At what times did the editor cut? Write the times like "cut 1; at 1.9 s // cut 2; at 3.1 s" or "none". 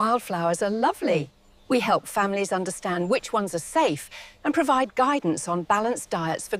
none

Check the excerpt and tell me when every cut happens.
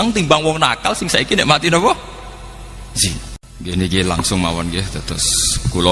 cut 1; at 3.4 s

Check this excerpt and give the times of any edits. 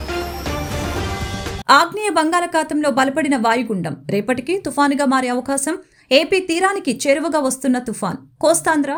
none

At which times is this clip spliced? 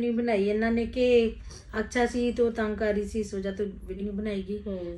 cut 1; at 4.0 s

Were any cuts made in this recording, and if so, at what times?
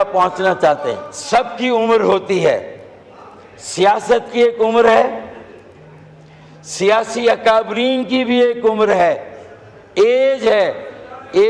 cut 1; at 1.1 s

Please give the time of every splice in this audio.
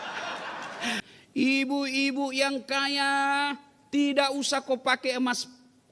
cut 1; at 1.0 s

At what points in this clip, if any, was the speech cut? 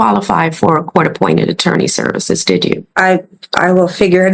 cut 1; at 2.9 s

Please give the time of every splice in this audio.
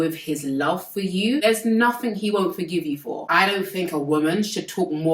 cut 1; at 3.2 s

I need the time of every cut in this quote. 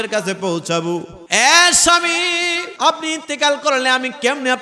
cut 1; at 1.2 s // cut 2; at 2.7 s

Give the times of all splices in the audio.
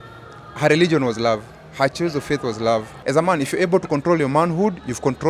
cut 1; at 2.9 s

